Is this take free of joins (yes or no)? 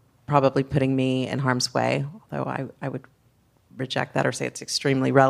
yes